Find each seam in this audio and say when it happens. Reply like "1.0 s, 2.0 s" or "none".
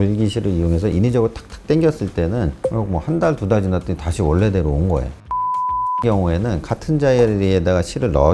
2.6 s